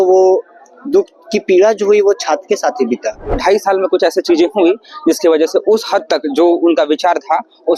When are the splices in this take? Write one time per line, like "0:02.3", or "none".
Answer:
0:03.4